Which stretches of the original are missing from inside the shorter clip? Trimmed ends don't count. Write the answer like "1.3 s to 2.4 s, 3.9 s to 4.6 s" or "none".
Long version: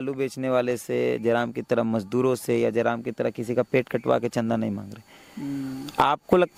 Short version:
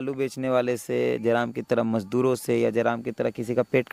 none